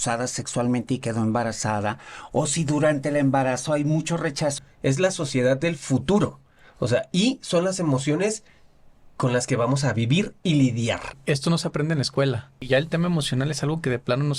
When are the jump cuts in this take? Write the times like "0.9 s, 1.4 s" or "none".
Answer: 4.6 s, 11.1 s, 12.7 s